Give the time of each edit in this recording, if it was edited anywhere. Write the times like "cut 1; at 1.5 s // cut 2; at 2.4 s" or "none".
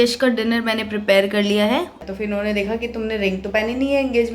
cut 1; at 2.0 s